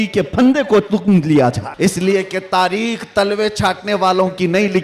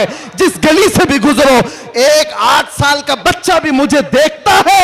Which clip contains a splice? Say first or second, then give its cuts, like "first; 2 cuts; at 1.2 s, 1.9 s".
first; 1 cut; at 1.7 s